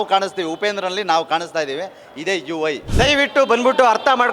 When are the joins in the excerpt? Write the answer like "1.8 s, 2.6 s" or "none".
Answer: 2.8 s